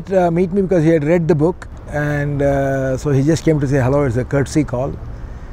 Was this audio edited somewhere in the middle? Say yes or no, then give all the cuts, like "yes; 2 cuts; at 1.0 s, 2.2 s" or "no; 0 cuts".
no; 0 cuts